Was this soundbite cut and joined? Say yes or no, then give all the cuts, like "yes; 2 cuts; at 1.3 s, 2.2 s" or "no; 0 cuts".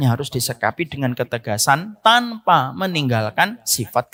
no; 0 cuts